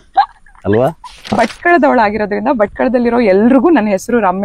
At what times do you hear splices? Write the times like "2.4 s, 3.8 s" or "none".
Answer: 1.3 s